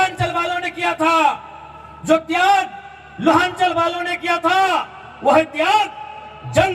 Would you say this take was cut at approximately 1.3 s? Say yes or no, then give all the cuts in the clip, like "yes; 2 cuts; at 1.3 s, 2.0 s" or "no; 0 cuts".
no; 0 cuts